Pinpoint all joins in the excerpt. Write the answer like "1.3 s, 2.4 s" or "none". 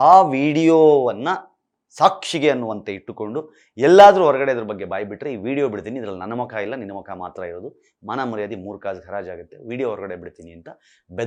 none